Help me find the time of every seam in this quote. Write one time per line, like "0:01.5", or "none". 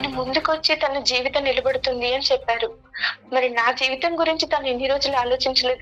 none